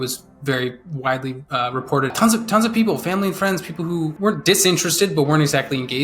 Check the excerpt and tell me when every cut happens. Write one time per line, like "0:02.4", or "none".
0:02.1